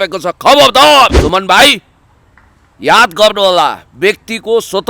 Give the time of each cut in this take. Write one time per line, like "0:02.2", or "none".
0:01.2

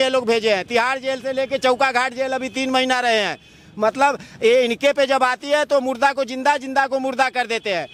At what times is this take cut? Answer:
none

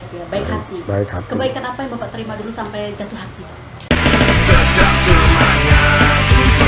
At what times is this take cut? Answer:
0:03.7

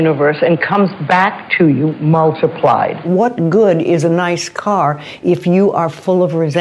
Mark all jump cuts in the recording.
0:03.1

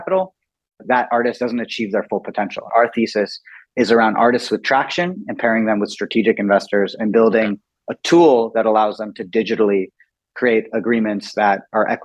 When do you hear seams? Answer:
0:00.8
0:02.7

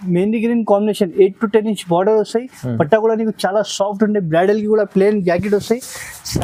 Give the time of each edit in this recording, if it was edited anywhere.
none

